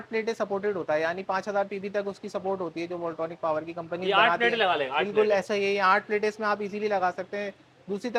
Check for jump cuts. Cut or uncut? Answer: uncut